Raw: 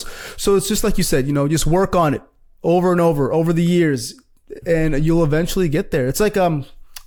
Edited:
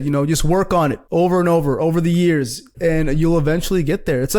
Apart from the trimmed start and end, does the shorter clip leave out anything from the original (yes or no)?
yes